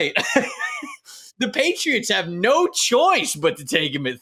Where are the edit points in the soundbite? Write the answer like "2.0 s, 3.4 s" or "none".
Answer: none